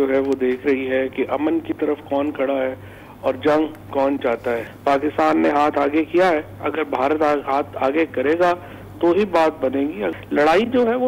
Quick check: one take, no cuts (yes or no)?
no